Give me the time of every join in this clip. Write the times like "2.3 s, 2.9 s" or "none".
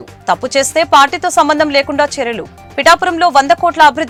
none